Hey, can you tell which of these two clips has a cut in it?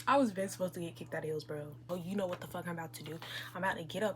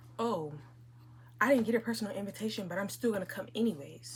first; 1 cut; at 1.9 s

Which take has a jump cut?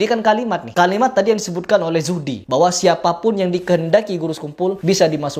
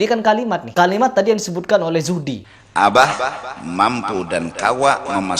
second; 1 cut; at 2.4 s

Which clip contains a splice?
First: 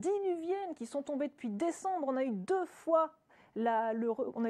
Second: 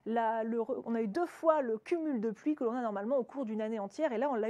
second; 1 cut; at 2.6 s

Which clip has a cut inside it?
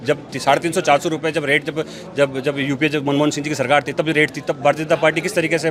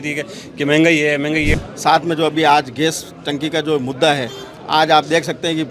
second; 1 cut; at 1.6 s

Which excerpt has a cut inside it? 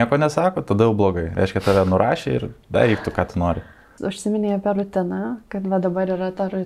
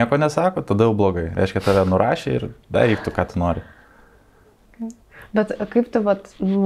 first; 1 cut; at 3.9 s

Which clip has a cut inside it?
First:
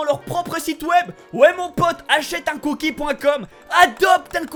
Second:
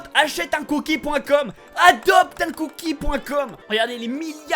second; 1 cut; at 3.6 s

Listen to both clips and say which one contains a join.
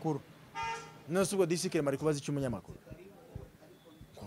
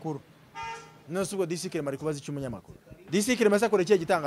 second; 1 cut; at 3.1 s

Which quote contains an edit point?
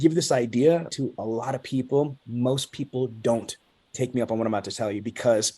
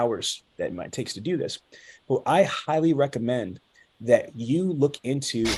first; 1 cut; at 0.9 s

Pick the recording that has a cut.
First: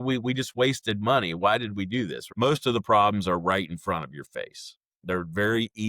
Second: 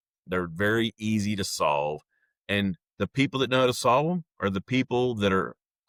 first; 1 cut; at 2.2 s

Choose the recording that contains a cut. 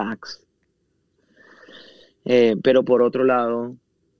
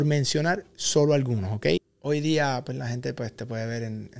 second; 1 cut; at 1.9 s

